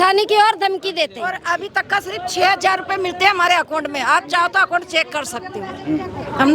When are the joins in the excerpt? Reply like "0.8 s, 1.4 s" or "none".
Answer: none